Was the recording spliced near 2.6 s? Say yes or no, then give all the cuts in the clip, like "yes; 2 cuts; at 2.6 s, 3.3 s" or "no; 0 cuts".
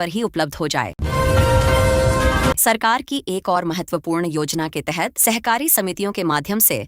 yes; 2 cuts; at 0.9 s, 2.6 s